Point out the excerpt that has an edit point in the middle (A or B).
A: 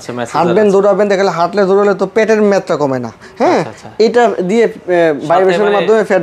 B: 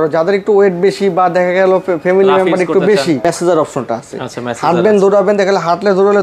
B